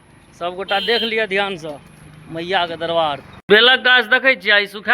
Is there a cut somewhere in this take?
yes; 1 cut; at 3.5 s

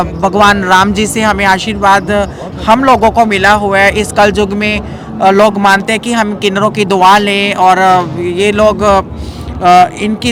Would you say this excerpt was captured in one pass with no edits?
yes; 0 cuts

